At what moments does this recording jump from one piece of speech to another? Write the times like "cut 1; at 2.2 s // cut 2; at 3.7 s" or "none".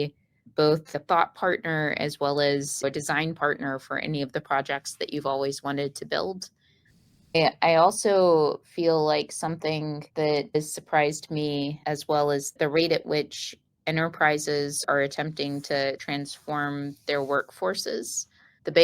cut 1; at 2.8 s // cut 2; at 6.9 s